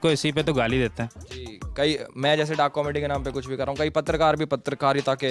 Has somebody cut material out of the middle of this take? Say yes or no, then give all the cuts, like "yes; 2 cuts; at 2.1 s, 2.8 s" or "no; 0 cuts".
no; 0 cuts